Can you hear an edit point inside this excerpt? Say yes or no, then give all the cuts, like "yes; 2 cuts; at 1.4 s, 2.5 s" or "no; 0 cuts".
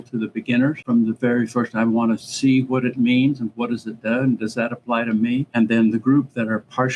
yes; 2 cuts; at 0.8 s, 5.5 s